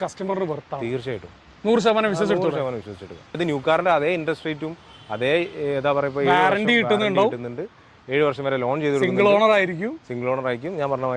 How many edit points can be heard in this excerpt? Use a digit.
1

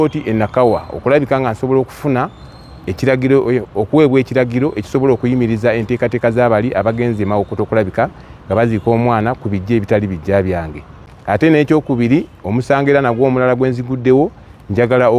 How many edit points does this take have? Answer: 1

